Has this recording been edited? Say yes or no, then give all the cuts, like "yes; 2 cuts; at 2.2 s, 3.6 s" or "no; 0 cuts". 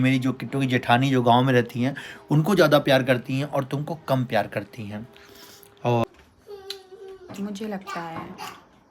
yes; 1 cut; at 6.0 s